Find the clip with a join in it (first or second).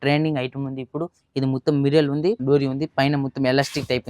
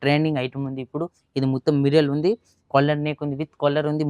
first